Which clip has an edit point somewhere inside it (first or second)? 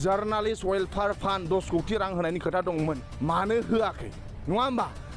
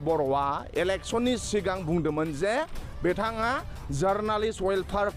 first